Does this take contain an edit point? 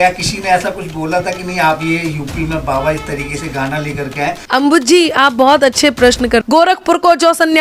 yes; 2 cuts; at 4.4 s, 6.4 s

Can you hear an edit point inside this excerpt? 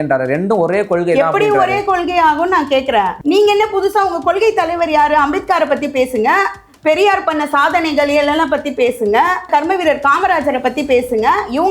yes; 1 cut; at 3.1 s

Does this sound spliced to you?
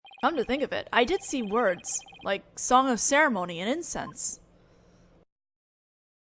yes; 1 cut; at 2.1 s

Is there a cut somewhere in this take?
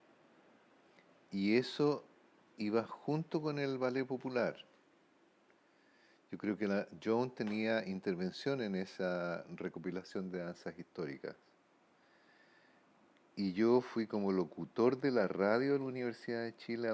yes; 1 cut; at 13.2 s

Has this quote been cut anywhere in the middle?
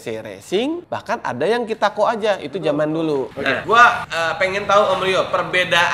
yes; 3 cuts; at 0.8 s, 3.5 s, 4.1 s

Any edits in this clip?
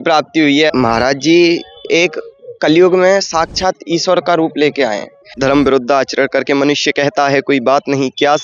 yes; 2 cuts; at 0.7 s, 5.3 s

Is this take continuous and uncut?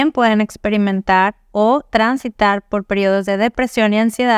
yes; 0 cuts

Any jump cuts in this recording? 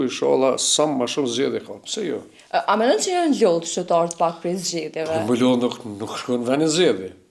no; 0 cuts

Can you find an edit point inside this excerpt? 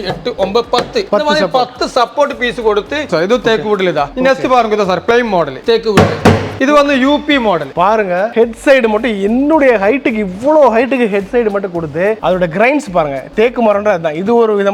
yes; 5 cuts; at 3.1 s, 5.5 s, 6.5 s, 8.2 s, 12.2 s

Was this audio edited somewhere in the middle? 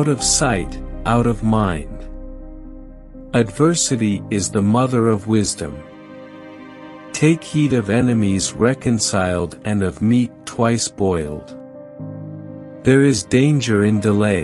yes; 2 cuts; at 11.5 s, 12.8 s

